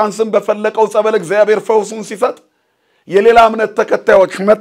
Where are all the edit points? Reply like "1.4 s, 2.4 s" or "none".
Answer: none